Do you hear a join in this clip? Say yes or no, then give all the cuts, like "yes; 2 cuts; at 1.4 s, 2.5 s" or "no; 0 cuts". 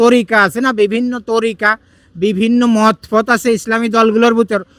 no; 0 cuts